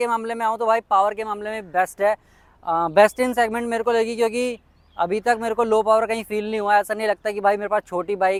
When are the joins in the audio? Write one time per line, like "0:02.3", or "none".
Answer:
none